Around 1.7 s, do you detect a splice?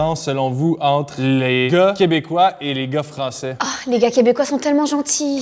yes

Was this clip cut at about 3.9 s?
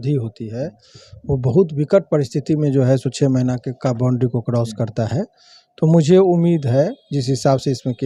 no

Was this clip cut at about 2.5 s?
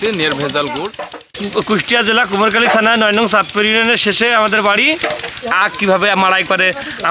no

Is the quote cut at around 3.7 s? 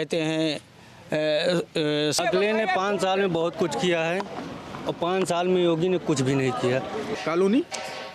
no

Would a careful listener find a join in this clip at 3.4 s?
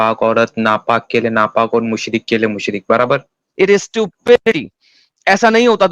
yes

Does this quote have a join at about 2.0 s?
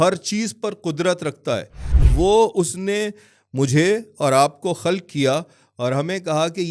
yes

